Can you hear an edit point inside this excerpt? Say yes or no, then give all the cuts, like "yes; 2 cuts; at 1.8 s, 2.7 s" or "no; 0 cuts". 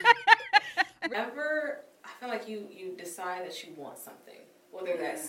yes; 1 cut; at 1.1 s